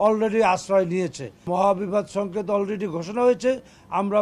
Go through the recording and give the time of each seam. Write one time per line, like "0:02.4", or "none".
0:01.5